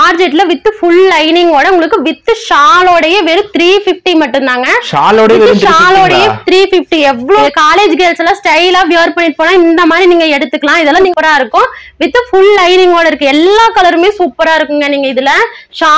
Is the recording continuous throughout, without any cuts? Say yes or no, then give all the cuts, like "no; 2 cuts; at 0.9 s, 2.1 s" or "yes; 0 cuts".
yes; 0 cuts